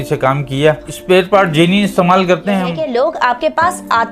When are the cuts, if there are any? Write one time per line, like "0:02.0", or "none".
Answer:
0:02.8